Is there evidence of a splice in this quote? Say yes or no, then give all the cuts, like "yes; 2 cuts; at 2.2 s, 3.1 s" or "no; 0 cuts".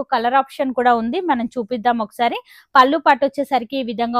no; 0 cuts